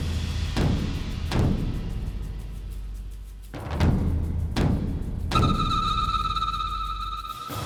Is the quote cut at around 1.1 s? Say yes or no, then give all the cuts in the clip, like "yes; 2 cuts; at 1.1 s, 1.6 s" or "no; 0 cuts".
no; 0 cuts